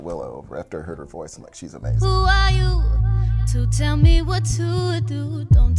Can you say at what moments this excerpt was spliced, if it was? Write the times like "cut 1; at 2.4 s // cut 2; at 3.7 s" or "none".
cut 1; at 1.8 s